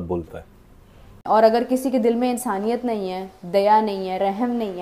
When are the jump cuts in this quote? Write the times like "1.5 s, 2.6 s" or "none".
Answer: 1.1 s